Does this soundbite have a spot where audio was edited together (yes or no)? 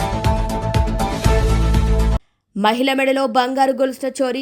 yes